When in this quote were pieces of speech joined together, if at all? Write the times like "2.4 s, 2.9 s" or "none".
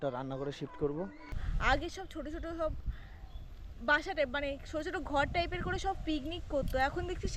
1.4 s